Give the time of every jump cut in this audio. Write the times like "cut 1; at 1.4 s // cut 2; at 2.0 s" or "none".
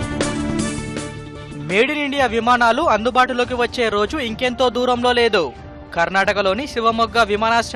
none